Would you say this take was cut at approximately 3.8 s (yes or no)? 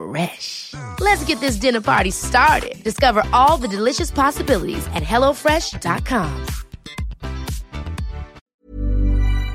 no